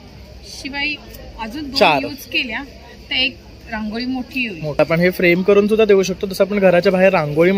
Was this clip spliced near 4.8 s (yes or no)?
yes